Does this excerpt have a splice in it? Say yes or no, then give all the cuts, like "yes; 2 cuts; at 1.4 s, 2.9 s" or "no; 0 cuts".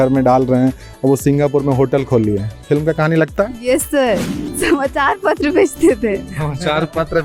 yes; 1 cut; at 4.3 s